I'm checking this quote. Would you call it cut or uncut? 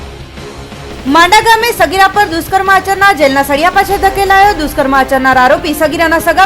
cut